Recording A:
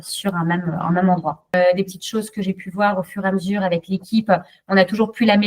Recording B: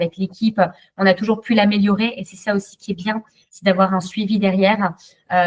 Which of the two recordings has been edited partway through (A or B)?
A